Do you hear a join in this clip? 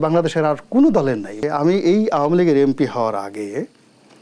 yes; 1 cut; at 1.3 s

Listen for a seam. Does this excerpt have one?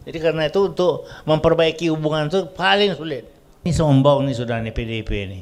yes; 1 cut; at 3.7 s

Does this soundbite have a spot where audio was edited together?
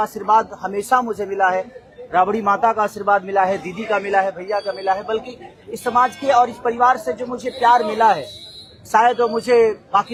no; 0 cuts

